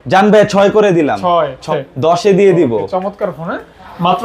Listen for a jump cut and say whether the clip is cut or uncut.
cut